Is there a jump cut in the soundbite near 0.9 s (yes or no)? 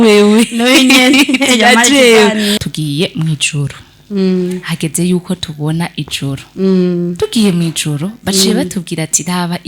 no